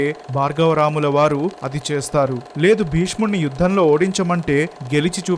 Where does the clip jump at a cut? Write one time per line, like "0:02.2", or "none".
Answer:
none